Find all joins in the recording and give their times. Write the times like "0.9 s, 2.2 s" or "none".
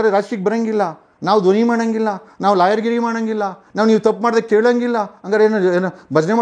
none